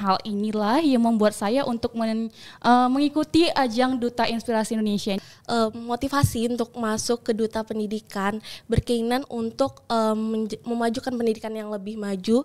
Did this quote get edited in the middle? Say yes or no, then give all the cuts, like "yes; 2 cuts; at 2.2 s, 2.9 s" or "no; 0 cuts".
yes; 1 cut; at 5.2 s